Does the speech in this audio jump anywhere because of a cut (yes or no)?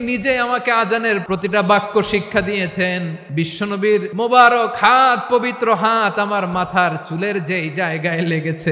yes